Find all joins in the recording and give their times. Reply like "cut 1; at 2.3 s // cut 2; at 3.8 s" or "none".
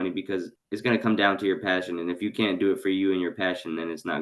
none